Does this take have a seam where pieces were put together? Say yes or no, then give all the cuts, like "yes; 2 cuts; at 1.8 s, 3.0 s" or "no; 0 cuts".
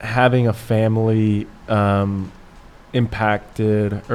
no; 0 cuts